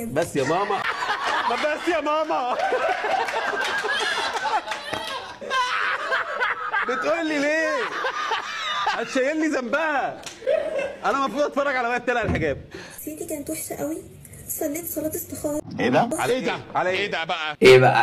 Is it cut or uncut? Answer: uncut